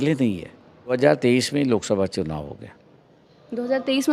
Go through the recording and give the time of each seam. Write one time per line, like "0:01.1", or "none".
0:01.0